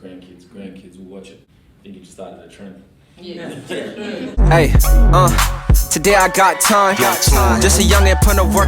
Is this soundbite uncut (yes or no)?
no